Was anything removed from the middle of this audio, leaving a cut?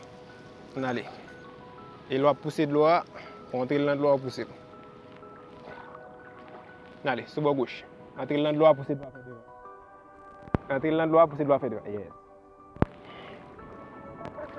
no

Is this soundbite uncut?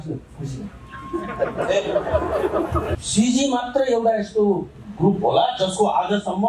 no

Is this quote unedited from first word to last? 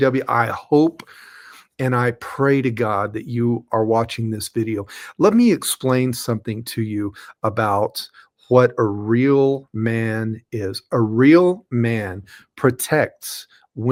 yes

